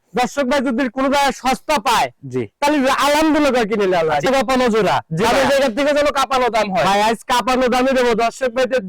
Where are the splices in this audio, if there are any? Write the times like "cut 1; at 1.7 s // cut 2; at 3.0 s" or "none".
cut 1; at 4.3 s